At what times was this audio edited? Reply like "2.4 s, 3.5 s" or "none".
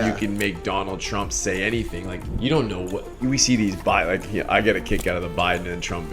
2.2 s